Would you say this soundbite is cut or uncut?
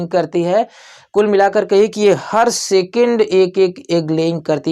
uncut